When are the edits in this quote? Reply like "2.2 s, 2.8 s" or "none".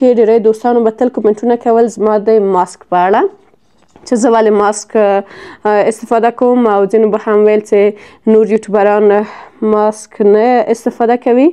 none